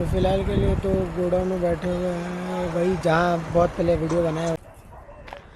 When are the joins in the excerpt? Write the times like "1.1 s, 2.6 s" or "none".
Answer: 4.6 s